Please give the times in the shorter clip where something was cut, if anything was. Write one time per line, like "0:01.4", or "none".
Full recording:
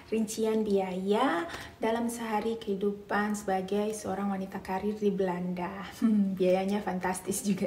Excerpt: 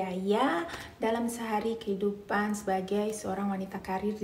none